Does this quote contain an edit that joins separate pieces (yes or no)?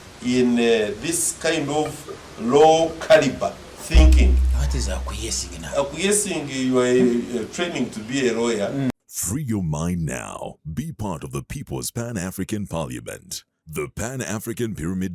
yes